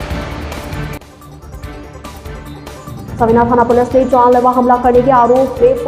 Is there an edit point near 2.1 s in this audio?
yes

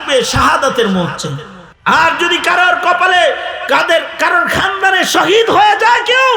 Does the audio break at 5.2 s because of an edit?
no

